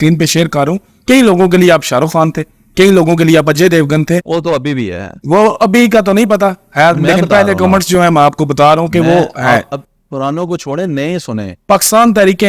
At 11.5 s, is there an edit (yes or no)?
yes